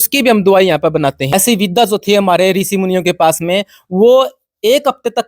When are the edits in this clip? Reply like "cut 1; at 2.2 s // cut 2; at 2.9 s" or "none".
cut 1; at 1.3 s

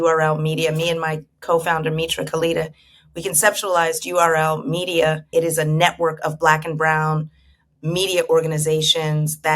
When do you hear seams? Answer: cut 1; at 5.3 s

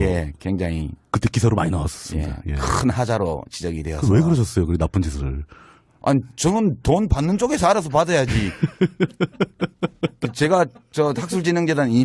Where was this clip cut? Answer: none

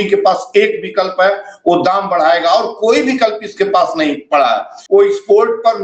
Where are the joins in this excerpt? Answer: cut 1; at 4.7 s

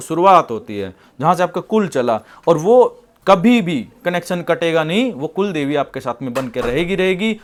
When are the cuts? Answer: none

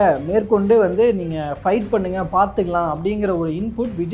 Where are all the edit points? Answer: none

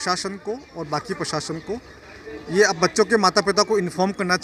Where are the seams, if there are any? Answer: none

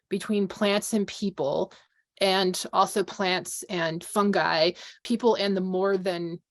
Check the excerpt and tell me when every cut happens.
cut 1; at 5.0 s

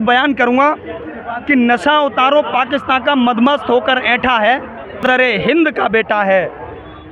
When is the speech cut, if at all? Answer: cut 1; at 5.0 s

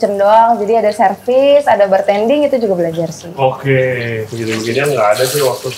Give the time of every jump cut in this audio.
cut 1; at 4.3 s

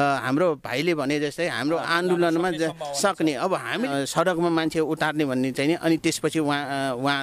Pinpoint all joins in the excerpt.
cut 1; at 1.8 s // cut 2; at 3.9 s

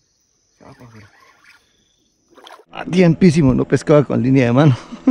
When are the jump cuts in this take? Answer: cut 1; at 2.7 s

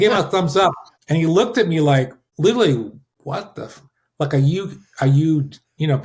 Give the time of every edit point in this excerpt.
cut 1; at 0.9 s // cut 2; at 2.2 s // cut 3; at 3.1 s

